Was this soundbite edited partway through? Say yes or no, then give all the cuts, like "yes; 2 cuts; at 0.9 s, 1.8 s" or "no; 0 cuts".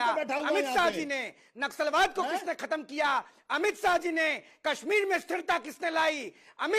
no; 0 cuts